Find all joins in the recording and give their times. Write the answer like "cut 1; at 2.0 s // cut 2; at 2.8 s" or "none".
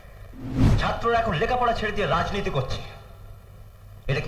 none